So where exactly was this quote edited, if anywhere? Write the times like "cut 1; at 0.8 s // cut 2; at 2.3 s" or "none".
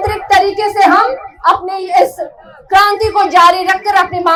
none